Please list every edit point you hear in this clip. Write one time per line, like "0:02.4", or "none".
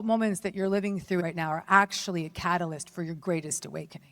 0:01.2